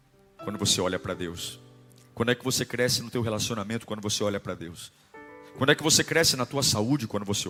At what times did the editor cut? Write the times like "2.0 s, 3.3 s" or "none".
none